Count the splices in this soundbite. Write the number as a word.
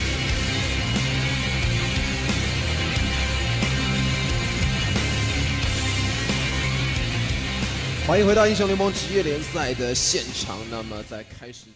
zero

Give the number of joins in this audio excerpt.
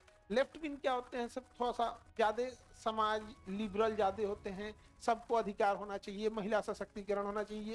one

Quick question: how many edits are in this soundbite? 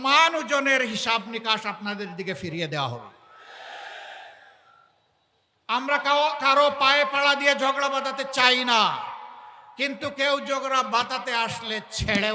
zero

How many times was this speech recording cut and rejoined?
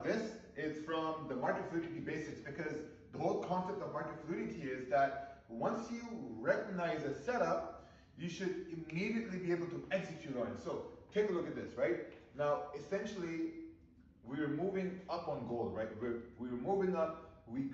one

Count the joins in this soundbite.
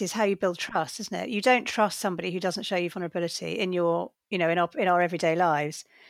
one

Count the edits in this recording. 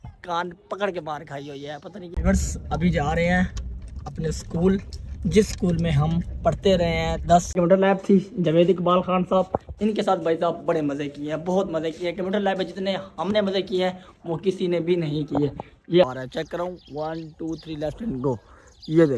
three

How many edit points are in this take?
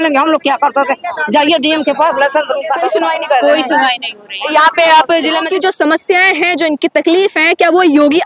two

